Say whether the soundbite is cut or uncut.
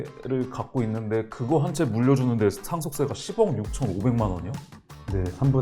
uncut